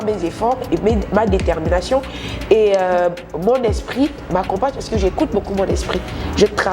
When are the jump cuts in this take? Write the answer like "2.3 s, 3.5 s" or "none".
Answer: none